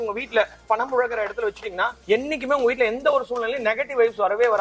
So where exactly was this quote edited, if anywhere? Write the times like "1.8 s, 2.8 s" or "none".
none